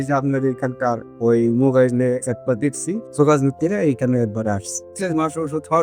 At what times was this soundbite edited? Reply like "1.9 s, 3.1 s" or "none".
3.1 s, 4.9 s